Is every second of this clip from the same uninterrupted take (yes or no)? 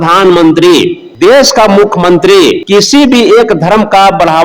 no